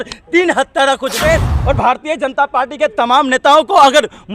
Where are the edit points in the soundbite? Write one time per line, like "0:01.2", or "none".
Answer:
0:01.1

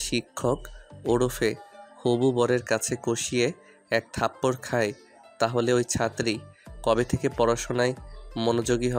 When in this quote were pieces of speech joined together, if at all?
none

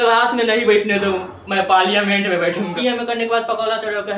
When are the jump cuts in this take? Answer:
0:02.7

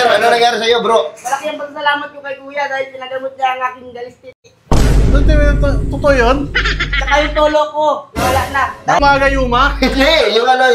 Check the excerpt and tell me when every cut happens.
0:09.0

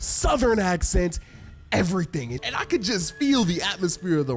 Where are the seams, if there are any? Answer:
0:02.4

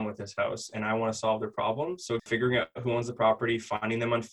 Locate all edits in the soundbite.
0:02.2

